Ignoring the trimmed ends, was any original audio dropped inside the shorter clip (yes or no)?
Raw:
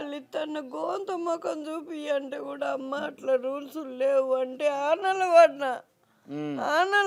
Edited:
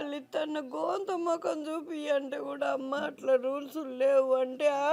no